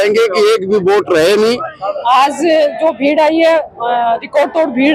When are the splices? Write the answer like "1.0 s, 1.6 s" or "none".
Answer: 2.0 s